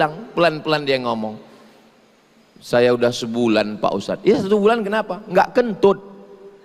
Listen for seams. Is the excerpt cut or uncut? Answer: uncut